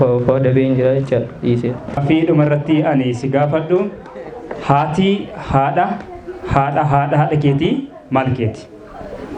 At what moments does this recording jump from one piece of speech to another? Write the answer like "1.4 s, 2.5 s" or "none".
2.0 s